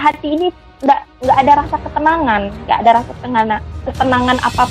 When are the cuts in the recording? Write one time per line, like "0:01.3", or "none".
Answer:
none